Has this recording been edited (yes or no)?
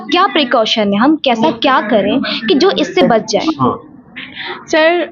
no